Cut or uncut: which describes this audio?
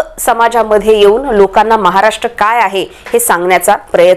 uncut